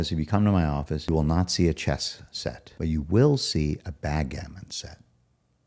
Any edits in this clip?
yes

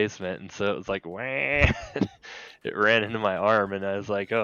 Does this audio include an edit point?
no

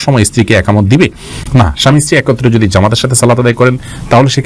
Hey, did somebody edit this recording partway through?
no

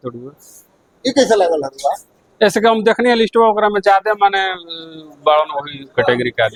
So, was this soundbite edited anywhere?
no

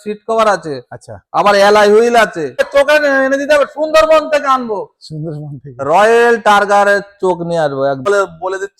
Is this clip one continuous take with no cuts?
no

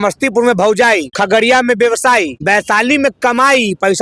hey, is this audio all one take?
no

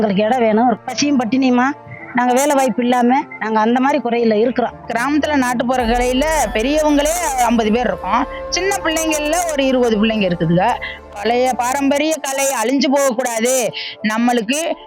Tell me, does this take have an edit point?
yes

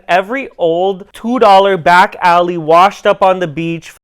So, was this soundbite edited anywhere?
no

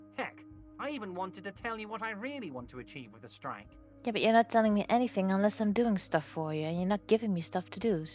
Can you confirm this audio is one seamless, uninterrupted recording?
yes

